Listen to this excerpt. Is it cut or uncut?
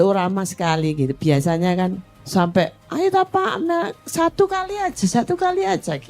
cut